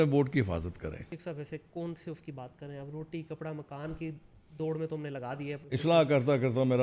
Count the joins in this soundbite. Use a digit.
2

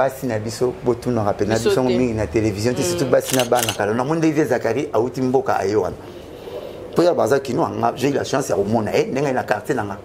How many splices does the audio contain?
1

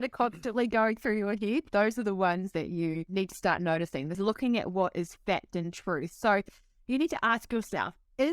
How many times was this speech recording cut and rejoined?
2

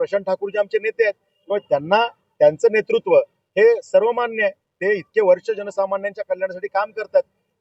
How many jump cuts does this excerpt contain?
0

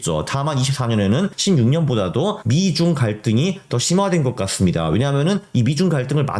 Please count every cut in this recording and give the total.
2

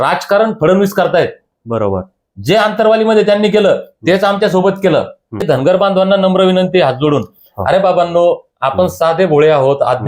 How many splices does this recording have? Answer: 1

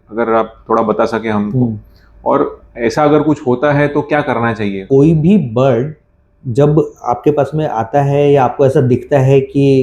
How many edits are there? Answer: 1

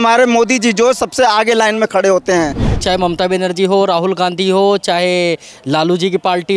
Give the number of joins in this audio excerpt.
1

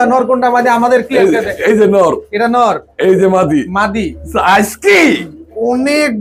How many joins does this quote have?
0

